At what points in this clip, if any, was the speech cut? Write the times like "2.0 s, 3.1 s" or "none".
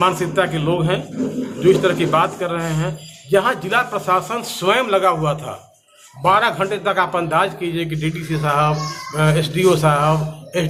none

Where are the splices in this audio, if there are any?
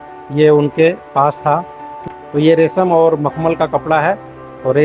2.0 s

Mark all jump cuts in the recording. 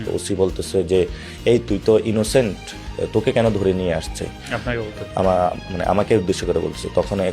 none

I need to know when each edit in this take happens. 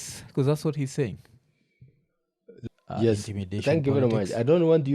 2.5 s

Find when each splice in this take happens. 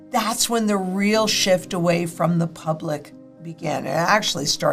none

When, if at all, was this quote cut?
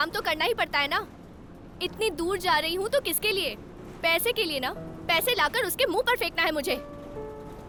none

